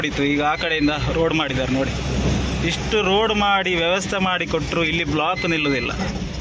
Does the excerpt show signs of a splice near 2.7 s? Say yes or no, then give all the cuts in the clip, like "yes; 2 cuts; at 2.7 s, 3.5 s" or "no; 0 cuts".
no; 0 cuts